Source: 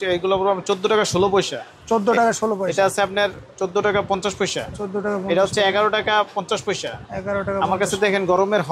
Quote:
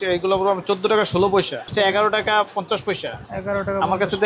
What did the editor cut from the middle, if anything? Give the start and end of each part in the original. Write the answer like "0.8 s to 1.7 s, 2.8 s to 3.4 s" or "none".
1.7 s to 5.5 s